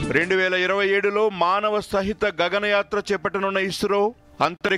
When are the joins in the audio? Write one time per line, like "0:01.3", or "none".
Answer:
none